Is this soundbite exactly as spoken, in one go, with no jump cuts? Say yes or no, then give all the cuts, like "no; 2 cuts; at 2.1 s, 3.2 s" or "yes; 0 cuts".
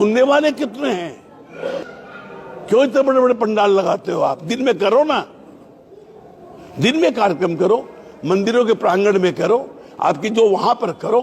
no; 1 cut; at 1.9 s